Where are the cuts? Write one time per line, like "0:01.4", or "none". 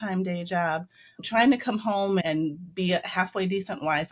0:01.2
0:02.2

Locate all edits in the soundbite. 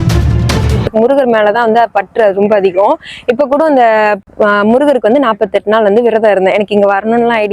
0:00.9
0:04.2

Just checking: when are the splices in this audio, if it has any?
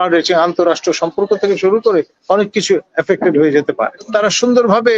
0:04.0

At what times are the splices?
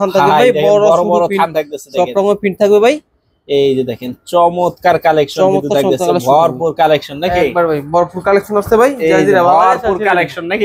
none

